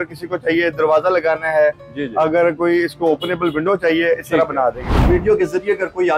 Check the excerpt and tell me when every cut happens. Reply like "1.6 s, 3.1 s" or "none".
5.0 s